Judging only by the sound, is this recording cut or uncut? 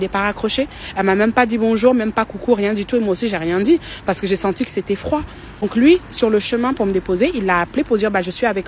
uncut